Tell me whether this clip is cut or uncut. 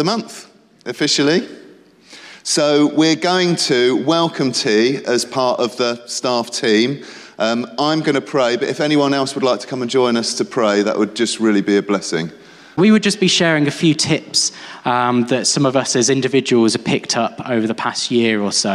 cut